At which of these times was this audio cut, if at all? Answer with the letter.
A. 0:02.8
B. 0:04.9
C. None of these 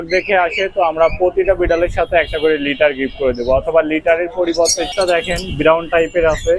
B